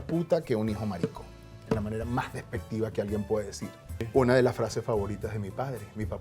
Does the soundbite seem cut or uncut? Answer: cut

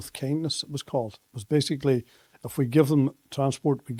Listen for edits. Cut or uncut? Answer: uncut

